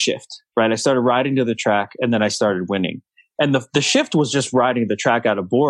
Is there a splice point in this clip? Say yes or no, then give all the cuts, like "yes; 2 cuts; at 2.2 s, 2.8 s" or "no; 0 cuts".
no; 0 cuts